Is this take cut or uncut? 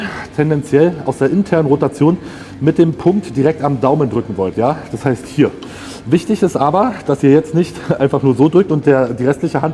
uncut